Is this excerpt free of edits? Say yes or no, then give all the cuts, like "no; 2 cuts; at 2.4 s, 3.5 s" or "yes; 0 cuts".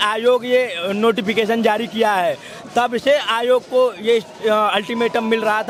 yes; 0 cuts